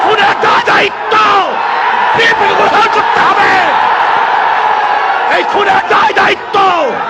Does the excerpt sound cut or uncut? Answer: uncut